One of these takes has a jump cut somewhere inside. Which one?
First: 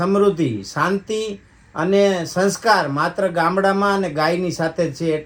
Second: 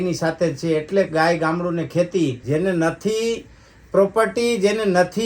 second; 1 cut; at 2.4 s

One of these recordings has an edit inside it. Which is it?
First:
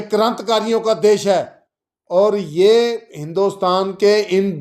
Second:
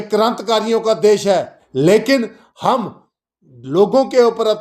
second; 1 cut; at 1.6 s

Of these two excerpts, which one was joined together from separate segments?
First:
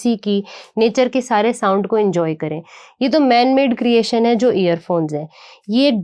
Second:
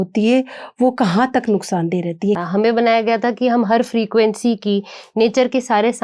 second; 1 cut; at 2.4 s

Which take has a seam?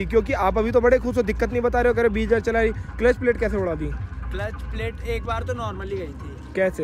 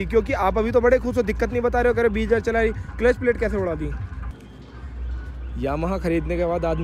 second; 1 cut; at 4.1 s

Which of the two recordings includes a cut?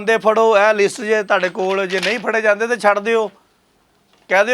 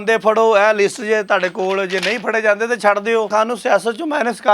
second; 1 cut; at 3.3 s

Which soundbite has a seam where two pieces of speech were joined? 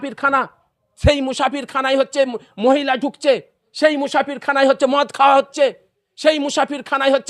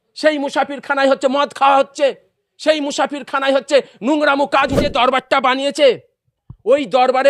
second; 1 cut; at 4.7 s

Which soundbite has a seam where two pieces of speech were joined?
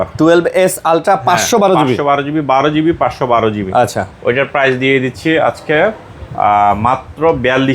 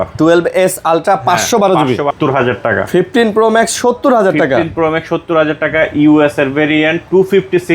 second; 1 cut; at 2.1 s

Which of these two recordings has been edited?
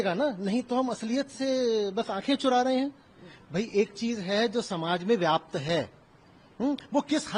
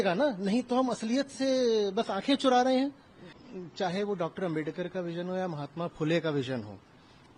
second; 1 cut; at 3.4 s

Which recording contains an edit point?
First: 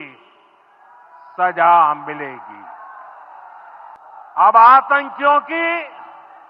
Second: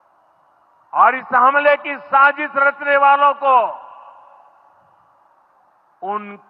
first; 1 cut; at 4.0 s

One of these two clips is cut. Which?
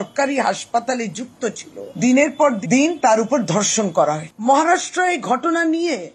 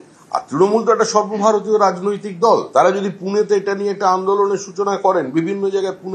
first; 1 cut; at 4.3 s

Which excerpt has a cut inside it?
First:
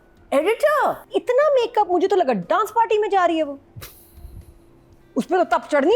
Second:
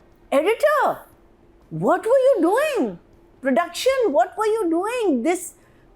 first; 1 cut; at 1.0 s

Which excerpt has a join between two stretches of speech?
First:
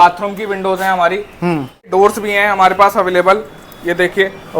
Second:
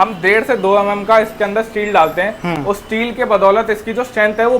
first; 1 cut; at 1.9 s

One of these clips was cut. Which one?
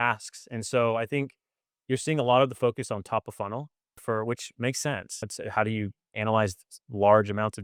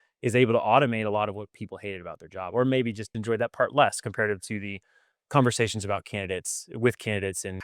second; 1 cut; at 3.1 s

